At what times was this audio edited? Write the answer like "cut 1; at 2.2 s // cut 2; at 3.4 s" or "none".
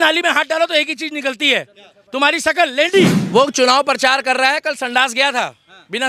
cut 1; at 3.2 s